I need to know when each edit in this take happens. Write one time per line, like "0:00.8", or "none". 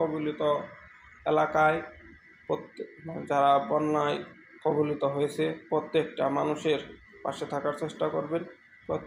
none